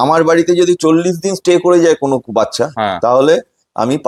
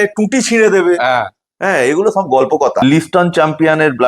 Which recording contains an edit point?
second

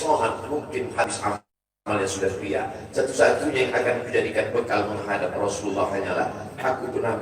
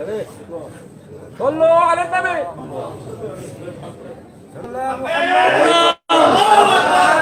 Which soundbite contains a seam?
first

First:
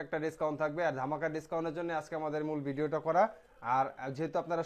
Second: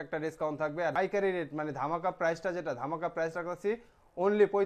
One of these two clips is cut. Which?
second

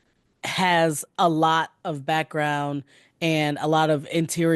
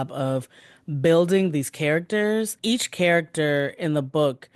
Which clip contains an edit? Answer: second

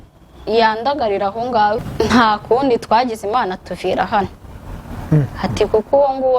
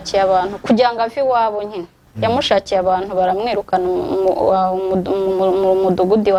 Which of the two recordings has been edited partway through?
first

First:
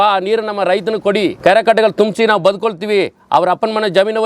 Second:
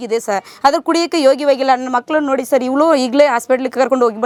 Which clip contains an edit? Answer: first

